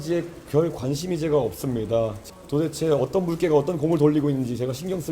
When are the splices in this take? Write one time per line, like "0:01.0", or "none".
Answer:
0:02.2